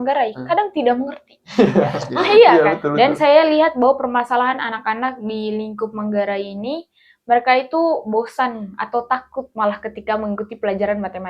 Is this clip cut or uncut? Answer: cut